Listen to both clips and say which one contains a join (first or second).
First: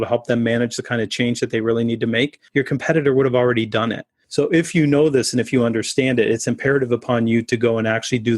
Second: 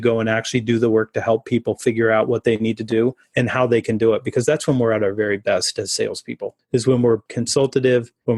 first